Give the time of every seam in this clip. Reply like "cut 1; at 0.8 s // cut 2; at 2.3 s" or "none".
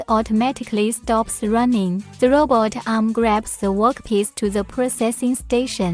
cut 1; at 2.1 s